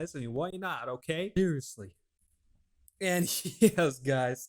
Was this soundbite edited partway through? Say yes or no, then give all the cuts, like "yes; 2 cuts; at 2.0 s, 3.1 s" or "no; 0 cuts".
yes; 1 cut; at 1.3 s